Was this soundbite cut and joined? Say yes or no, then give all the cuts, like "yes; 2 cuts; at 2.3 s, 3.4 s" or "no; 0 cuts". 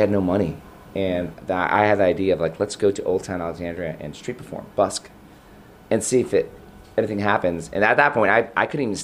no; 0 cuts